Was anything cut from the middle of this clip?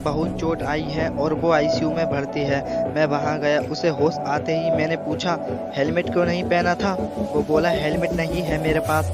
no; 0 cuts

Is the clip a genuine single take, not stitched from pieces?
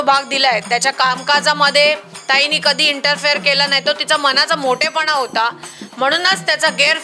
yes; 0 cuts

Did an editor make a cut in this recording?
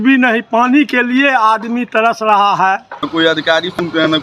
yes; 1 cut; at 3.1 s

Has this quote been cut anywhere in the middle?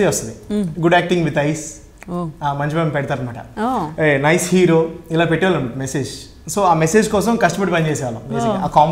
no; 0 cuts

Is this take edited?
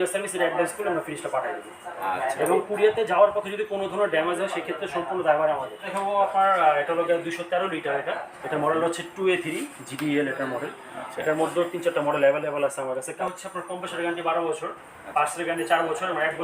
yes; 2 cuts; at 5.8 s, 13.2 s

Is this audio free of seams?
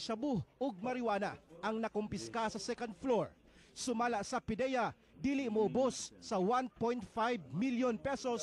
yes; 0 cuts

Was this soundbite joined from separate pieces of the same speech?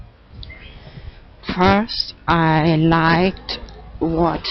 no; 0 cuts

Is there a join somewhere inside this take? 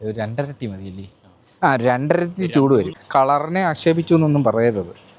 yes; 1 cut; at 3.0 s

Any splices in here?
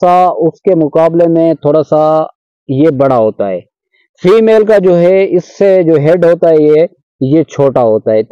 no; 0 cuts

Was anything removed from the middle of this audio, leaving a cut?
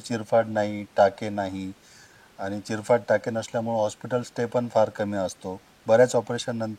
no; 0 cuts

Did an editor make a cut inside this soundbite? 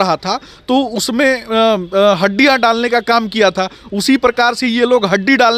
no; 0 cuts

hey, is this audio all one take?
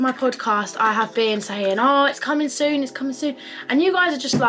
yes; 0 cuts

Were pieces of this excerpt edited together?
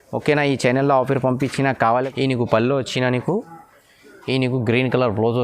yes; 1 cut; at 2.1 s

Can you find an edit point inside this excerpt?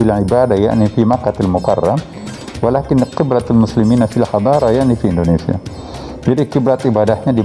no; 0 cuts

